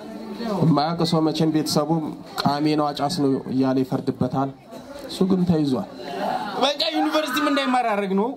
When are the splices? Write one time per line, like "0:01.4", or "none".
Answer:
0:06.0